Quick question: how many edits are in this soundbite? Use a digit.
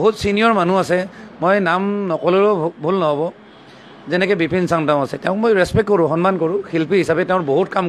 0